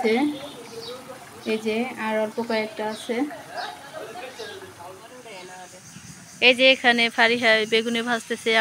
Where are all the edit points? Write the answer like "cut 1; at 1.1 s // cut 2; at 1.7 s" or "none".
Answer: cut 1; at 5.0 s